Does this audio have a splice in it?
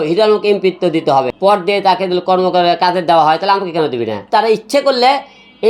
yes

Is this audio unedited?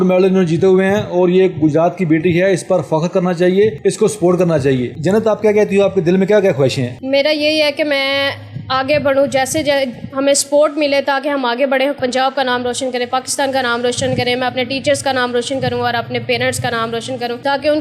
yes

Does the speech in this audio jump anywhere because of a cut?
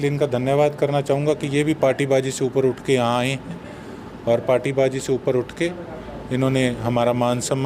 no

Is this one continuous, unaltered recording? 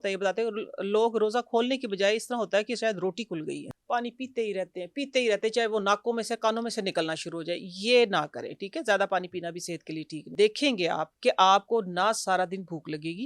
no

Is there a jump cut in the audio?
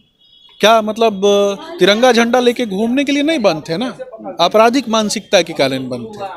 no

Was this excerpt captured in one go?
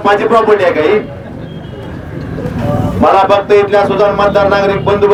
yes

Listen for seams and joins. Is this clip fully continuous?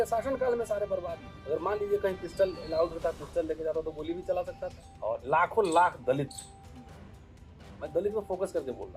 no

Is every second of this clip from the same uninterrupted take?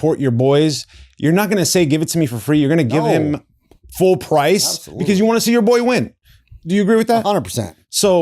yes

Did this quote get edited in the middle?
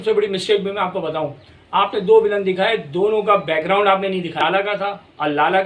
yes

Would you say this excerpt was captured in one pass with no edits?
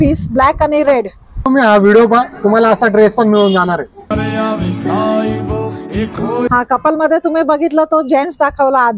no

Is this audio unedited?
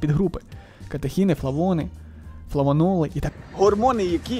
no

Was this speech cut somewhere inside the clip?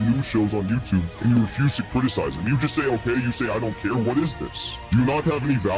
no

